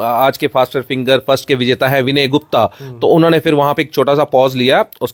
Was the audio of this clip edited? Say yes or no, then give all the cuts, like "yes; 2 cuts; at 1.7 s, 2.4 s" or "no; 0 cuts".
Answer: no; 0 cuts